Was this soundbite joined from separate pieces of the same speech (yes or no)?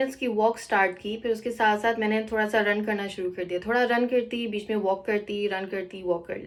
no